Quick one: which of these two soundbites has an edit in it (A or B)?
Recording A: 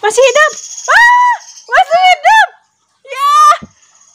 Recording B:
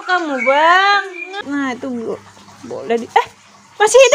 B